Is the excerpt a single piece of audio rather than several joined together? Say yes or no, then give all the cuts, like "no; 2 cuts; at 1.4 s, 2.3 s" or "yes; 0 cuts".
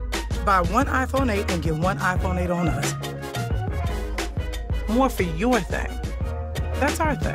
yes; 0 cuts